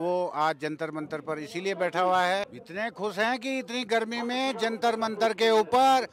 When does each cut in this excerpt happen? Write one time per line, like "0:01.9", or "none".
0:02.6

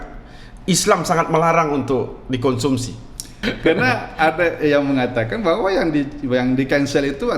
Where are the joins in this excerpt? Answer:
0:03.4

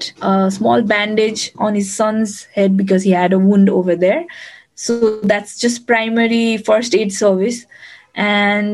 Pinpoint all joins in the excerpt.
0:01.4
0:05.2

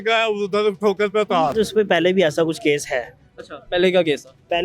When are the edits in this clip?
0:01.5

